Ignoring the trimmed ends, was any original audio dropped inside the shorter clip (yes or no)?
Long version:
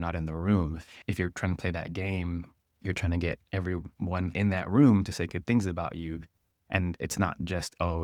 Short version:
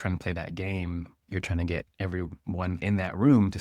yes